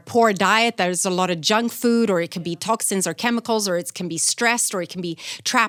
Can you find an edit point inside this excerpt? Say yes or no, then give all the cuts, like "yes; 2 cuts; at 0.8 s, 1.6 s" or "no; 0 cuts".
no; 0 cuts